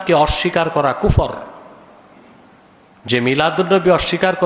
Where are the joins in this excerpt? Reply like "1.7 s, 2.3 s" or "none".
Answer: none